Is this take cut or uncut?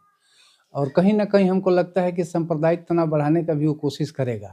uncut